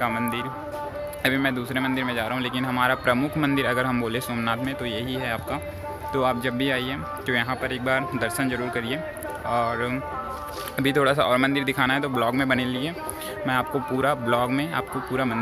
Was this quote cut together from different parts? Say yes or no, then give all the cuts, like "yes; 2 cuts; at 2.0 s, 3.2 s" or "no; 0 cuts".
no; 0 cuts